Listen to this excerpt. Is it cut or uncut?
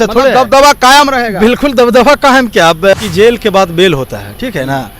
cut